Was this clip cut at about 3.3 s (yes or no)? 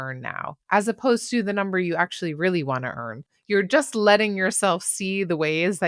yes